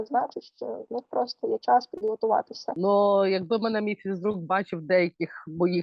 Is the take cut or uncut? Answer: cut